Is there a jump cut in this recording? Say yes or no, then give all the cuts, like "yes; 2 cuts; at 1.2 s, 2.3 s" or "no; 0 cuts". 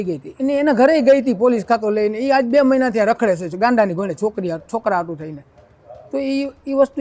no; 0 cuts